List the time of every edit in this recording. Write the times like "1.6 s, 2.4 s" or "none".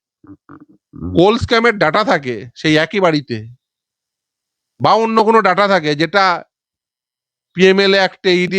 none